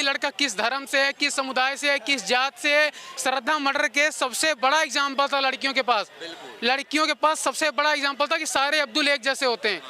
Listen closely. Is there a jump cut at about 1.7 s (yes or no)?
no